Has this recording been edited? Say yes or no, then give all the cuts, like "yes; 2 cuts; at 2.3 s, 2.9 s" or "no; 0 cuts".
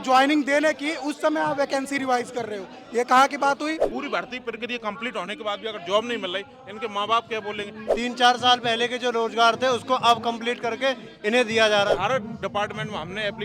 yes; 3 cuts; at 3.9 s, 7.8 s, 11.9 s